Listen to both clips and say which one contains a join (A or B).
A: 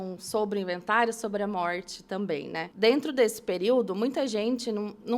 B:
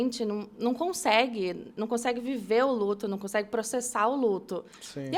A